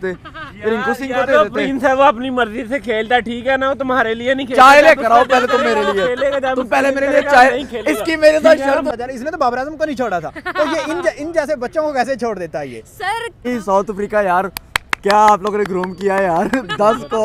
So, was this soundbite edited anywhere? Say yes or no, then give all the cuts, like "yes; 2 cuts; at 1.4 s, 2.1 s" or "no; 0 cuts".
yes; 2 cuts; at 8.9 s, 13.5 s